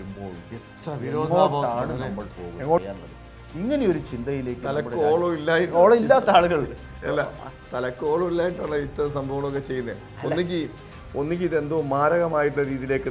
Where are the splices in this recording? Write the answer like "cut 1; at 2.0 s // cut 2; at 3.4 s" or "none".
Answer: cut 1; at 2.8 s